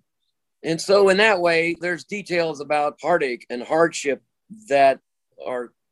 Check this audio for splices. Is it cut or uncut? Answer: cut